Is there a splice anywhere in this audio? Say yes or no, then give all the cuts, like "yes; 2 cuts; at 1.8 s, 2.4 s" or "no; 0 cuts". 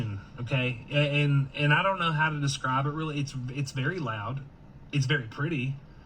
yes; 1 cut; at 1.5 s